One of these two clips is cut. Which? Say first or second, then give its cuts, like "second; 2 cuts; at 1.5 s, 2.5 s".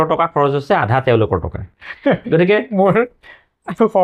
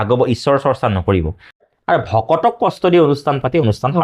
second; 1 cut; at 1.6 s